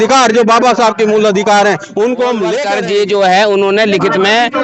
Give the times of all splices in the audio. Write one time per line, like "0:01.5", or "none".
0:02.6